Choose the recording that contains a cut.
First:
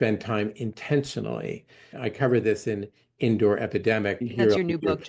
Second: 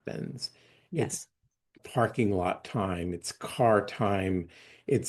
first; 2 cuts; at 1.9 s, 4.2 s

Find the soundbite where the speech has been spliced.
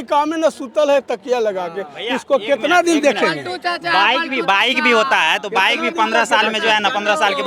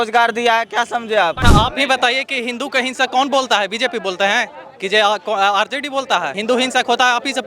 second; 2 cuts; at 1.4 s, 6.3 s

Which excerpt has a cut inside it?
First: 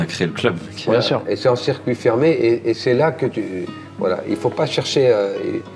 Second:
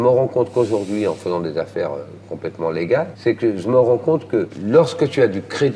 second; 2 cuts; at 3.1 s, 4.5 s

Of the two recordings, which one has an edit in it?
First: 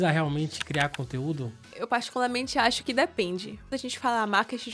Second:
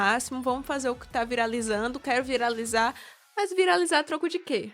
first; 2 cuts; at 1.7 s, 3.6 s

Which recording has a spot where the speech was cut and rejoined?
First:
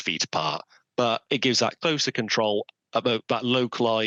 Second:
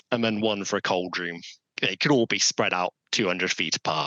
second; 1 cut; at 1.7 s

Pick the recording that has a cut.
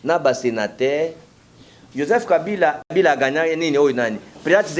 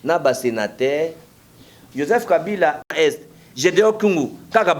second; 1 cut; at 2.9 s

